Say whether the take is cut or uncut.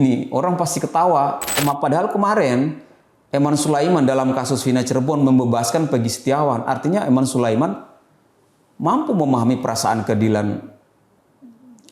cut